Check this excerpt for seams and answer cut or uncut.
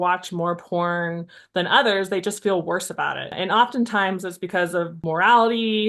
cut